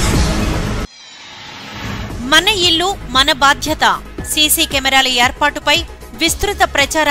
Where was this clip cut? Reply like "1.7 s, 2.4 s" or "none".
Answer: 0.7 s, 1.9 s